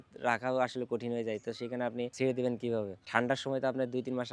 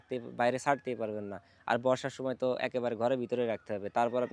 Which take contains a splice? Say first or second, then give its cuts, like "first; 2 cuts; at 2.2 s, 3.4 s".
first; 2 cuts; at 2.1 s, 3.0 s